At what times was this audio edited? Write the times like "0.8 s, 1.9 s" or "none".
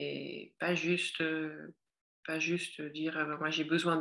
none